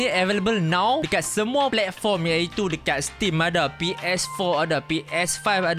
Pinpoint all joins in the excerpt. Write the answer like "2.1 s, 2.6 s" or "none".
1.5 s